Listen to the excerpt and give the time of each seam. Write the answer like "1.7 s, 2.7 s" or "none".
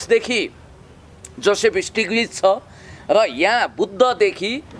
none